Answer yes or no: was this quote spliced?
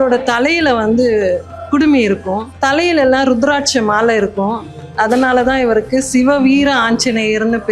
yes